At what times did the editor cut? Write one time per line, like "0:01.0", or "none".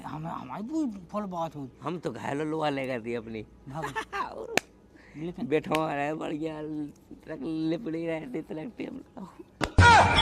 0:09.1